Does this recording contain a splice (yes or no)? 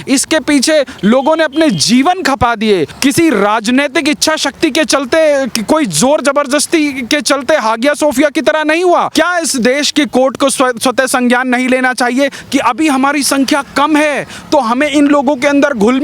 yes